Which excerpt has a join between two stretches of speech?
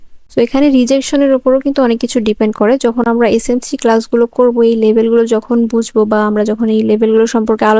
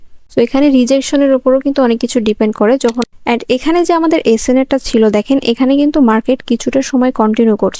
second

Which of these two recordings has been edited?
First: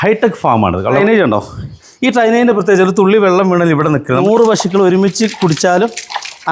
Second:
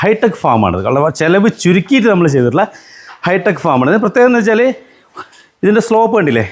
first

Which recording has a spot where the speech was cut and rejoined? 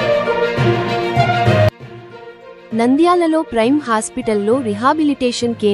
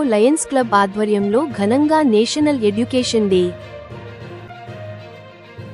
first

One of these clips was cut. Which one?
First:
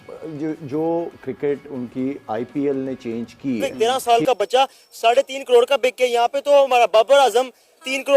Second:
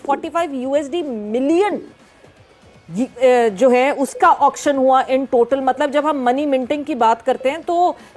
first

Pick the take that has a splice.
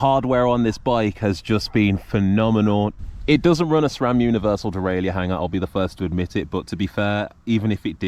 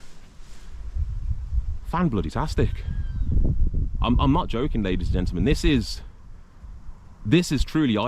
first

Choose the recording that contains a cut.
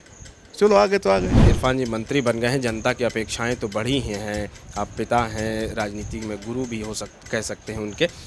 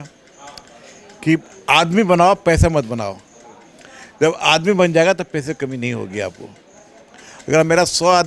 first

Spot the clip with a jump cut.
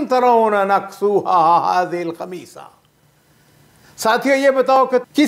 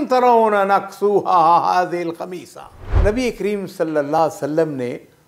second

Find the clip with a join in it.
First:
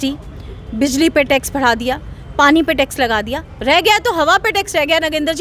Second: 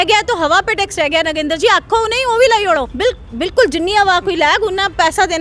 second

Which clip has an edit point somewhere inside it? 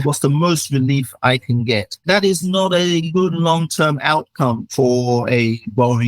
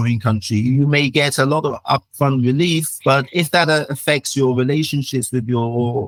first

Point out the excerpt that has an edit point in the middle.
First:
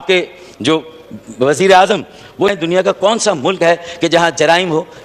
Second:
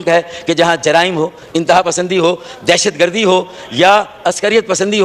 first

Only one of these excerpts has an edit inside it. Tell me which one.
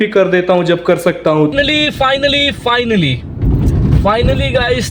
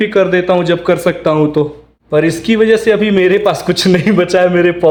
first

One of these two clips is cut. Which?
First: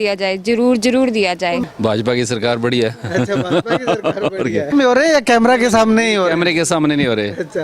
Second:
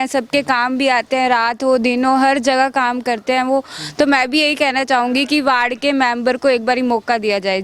first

